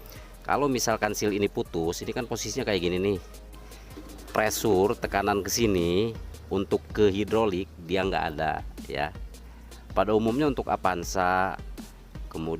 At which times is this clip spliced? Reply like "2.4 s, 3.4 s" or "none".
3.7 s